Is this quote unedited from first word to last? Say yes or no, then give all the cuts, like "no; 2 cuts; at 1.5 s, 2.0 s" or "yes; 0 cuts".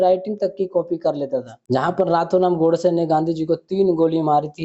no; 1 cut; at 1.5 s